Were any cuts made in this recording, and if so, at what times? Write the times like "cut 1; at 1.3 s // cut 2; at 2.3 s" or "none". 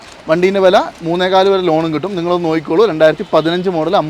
none